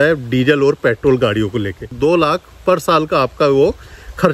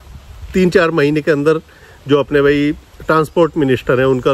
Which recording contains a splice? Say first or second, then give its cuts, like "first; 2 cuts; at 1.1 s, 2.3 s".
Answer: first; 1 cut; at 1.9 s